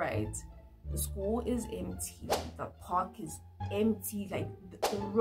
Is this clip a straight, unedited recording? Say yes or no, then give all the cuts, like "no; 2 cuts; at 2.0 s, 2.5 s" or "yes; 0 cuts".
yes; 0 cuts